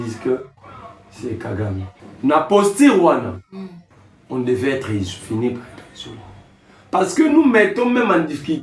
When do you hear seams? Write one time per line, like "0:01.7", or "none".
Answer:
0:02.0